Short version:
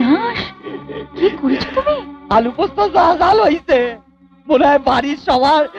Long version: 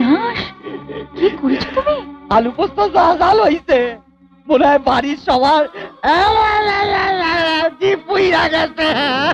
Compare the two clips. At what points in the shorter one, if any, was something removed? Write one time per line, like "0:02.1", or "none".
none